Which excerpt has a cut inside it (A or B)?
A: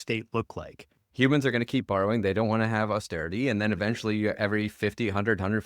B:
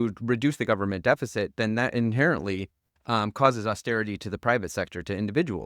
A